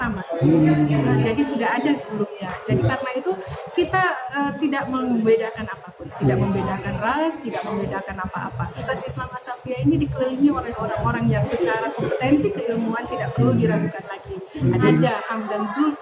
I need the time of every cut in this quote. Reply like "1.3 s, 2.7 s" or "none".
8.8 s, 11.5 s, 14.9 s